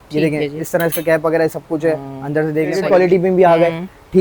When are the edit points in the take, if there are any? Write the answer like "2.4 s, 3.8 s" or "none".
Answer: 2.8 s

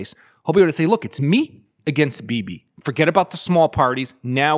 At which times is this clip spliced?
none

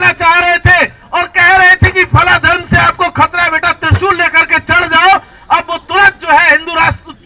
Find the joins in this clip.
none

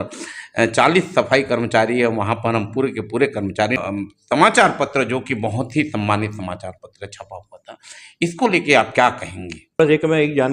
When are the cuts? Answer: 3.8 s, 9.8 s

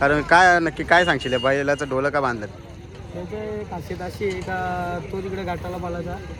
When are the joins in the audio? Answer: none

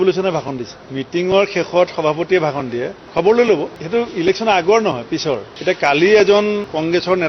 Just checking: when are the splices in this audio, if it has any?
3.7 s

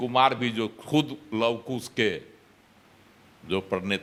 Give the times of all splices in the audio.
none

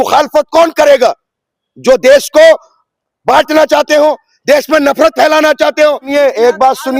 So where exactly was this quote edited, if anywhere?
6.1 s

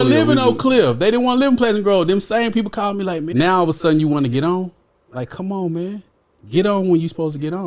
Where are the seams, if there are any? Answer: 3.3 s

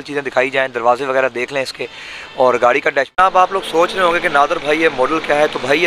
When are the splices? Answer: 3.2 s

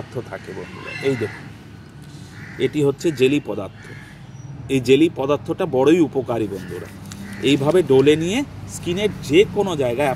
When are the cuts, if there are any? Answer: none

